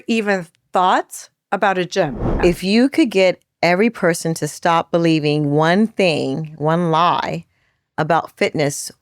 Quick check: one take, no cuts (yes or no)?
no